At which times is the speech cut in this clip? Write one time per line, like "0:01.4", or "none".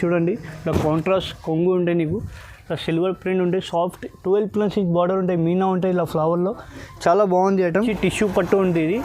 0:07.9